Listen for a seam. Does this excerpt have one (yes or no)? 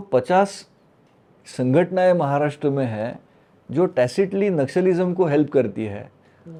no